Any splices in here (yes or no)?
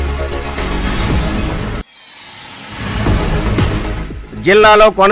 yes